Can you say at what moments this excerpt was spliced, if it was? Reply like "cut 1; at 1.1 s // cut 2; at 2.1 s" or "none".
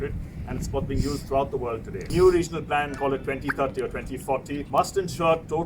cut 1; at 2.1 s // cut 2; at 2.9 s // cut 3; at 4.6 s